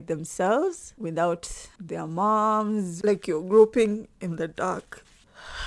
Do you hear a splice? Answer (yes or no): yes